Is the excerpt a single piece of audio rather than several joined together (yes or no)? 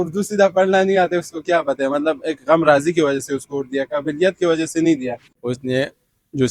no